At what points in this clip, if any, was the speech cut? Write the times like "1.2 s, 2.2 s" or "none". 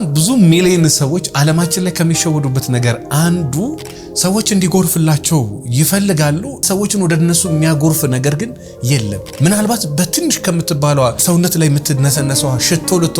6.6 s, 9.2 s, 11.2 s